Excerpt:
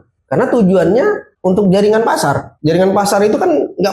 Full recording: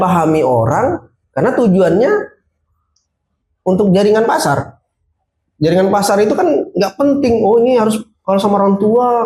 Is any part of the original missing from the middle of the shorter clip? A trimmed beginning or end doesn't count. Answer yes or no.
yes